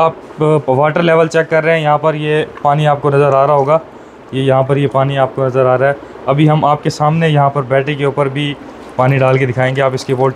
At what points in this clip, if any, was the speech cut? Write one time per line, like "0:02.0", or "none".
none